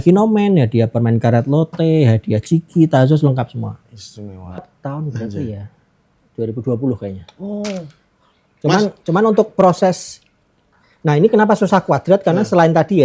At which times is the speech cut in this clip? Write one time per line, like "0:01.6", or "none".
0:04.7